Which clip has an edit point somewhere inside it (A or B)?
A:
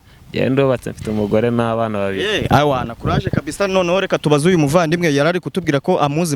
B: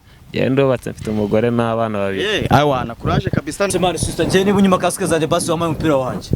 B